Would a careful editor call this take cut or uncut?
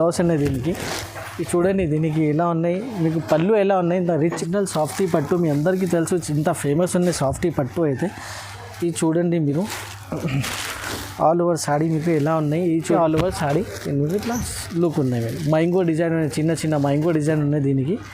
cut